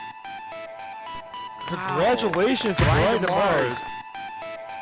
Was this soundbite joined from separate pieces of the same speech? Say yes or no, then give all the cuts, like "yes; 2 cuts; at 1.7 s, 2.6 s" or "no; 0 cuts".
yes; 1 cut; at 1.2 s